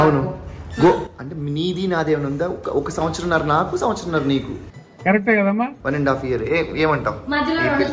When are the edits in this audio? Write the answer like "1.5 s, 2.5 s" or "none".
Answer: none